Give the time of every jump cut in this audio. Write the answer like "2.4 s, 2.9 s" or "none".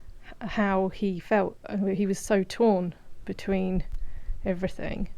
none